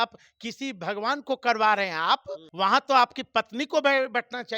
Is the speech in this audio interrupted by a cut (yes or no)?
yes